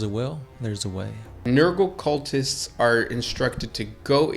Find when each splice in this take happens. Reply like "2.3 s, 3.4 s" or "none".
1.4 s